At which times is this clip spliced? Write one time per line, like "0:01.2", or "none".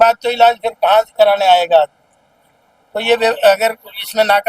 none